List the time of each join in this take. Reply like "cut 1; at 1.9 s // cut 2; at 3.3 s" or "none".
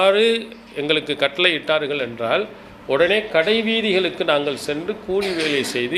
none